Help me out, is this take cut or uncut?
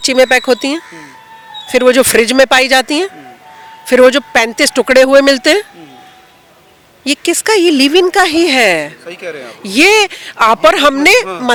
uncut